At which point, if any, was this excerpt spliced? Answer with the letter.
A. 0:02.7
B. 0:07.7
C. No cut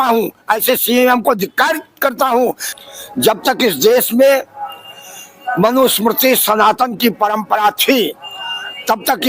A